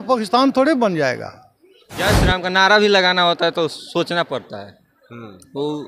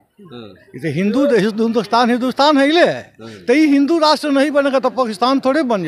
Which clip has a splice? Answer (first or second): first